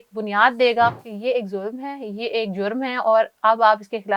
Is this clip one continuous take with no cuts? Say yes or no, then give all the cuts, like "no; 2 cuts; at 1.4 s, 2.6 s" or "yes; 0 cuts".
no; 1 cut; at 1.1 s